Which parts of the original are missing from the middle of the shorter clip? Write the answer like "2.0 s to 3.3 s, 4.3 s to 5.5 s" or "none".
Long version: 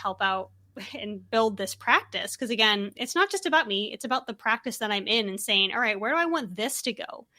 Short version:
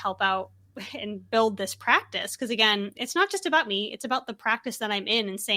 none

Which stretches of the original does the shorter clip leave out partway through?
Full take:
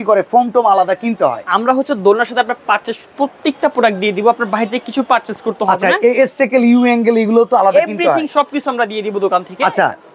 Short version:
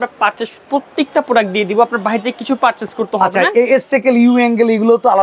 none

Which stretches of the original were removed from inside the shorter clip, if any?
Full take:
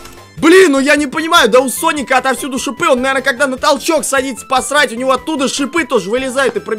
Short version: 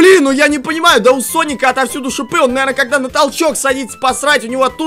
none

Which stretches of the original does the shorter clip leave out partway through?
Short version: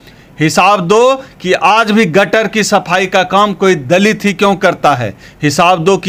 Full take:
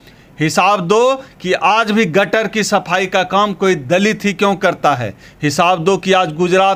none

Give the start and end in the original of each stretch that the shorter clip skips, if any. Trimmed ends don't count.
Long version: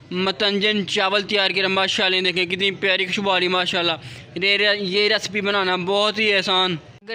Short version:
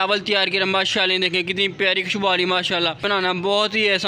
4.0 s to 5.5 s

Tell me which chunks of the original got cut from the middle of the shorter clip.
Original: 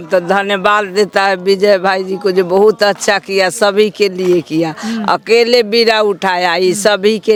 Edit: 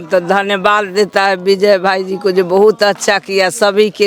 none

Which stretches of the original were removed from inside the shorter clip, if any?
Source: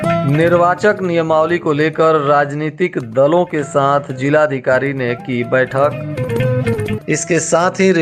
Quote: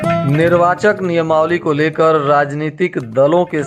none

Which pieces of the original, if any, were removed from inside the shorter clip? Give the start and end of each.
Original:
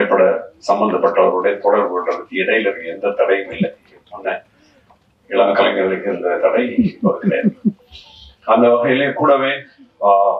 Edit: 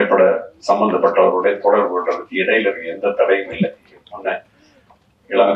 none

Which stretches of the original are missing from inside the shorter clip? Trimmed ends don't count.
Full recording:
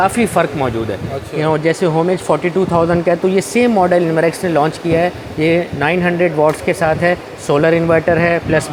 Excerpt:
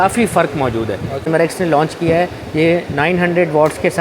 1.3 s to 4.1 s

